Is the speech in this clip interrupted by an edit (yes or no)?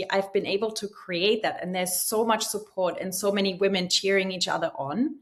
no